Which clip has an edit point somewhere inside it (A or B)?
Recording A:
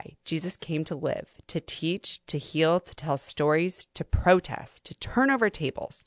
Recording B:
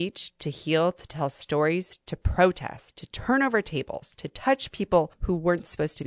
B